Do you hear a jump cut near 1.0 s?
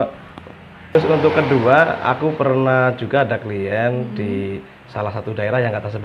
yes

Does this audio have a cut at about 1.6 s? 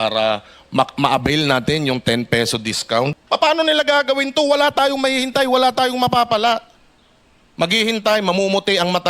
no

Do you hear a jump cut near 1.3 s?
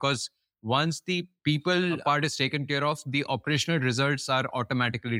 yes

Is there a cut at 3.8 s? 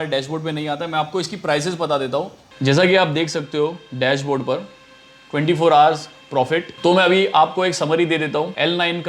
no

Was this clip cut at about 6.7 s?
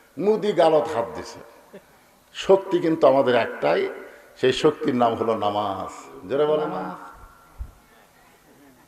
yes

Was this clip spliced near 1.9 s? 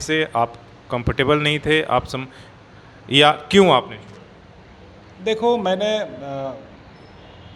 no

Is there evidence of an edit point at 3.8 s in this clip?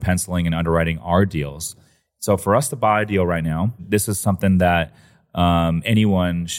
yes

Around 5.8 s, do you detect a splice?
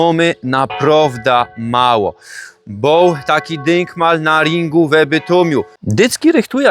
yes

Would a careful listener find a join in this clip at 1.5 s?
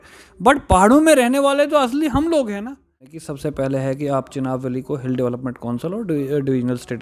no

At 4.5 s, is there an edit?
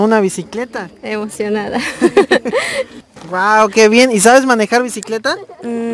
no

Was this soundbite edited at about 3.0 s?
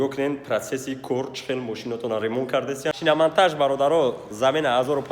yes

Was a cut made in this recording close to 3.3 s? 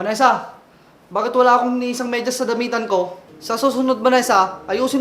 yes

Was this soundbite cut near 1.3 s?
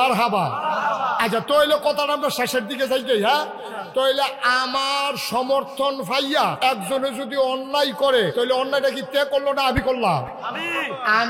no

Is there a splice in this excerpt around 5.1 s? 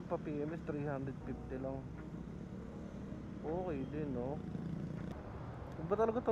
yes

